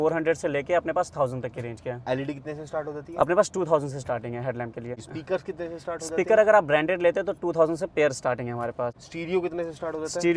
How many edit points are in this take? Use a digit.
2